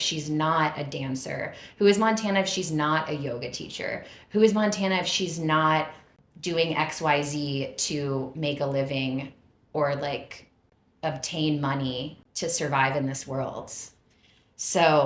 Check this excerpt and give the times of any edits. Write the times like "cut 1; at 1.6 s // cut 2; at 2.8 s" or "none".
none